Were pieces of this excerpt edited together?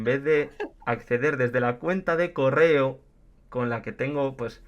no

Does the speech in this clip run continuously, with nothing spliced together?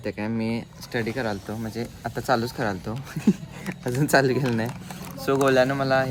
yes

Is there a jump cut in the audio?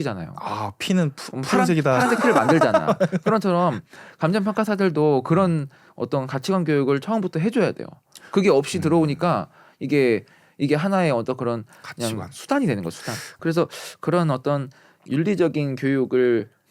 yes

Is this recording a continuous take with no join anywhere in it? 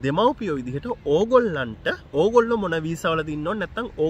yes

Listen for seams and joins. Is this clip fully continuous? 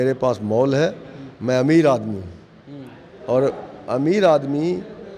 yes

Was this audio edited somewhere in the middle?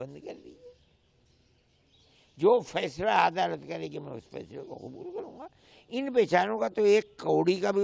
no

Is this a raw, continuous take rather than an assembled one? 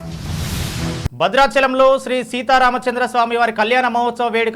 yes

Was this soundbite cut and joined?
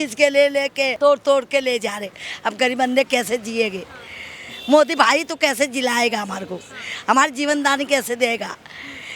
no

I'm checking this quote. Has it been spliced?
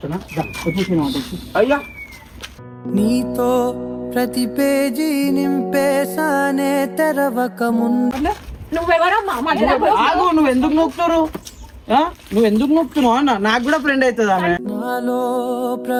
no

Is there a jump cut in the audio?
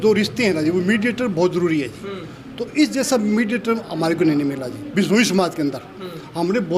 no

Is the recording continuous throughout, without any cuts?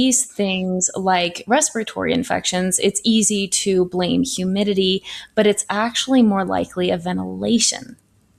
yes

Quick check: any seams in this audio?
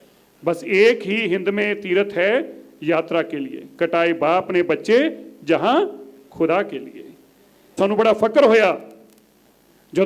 yes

